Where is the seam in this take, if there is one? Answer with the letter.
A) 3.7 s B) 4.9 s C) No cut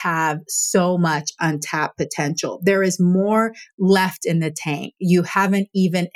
C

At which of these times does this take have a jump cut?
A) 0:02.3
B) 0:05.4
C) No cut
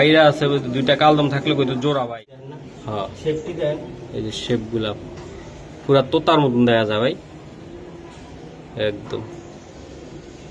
A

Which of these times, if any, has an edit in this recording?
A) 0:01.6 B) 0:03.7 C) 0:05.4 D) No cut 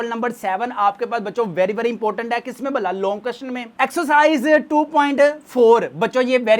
D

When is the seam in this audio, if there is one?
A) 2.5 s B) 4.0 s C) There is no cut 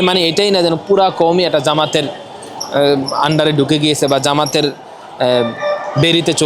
C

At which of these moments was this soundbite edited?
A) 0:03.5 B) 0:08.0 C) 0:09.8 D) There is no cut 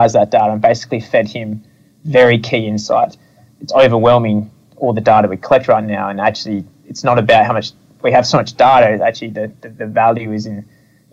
A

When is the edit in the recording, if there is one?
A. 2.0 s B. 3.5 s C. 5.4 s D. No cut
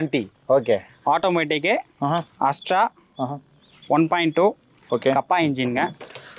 D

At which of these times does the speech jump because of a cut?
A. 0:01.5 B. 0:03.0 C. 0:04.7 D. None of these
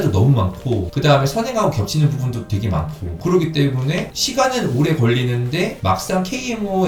D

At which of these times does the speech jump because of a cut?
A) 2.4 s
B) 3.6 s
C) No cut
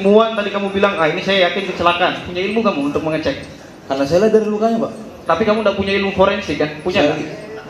C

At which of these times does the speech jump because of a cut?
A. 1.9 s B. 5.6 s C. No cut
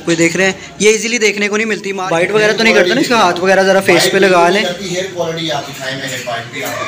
A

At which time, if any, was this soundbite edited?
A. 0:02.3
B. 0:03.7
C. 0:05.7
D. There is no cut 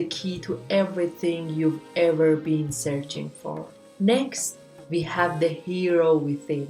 D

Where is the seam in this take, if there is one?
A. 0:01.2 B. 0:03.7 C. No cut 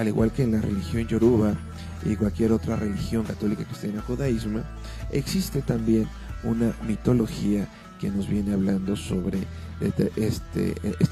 B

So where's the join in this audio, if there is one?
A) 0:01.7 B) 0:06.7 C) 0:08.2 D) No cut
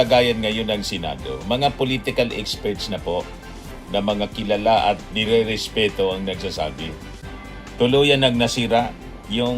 D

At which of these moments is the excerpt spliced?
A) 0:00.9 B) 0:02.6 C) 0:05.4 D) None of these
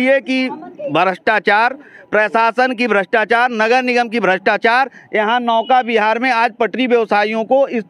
D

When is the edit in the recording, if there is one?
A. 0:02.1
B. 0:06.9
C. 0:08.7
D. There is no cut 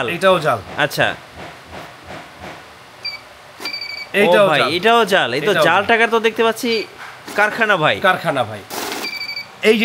C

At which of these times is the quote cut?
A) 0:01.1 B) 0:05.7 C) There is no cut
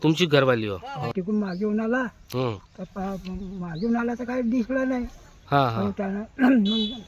A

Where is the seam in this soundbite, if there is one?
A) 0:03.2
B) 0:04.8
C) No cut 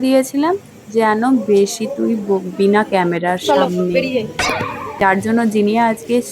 B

